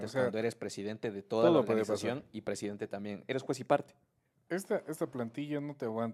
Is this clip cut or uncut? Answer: cut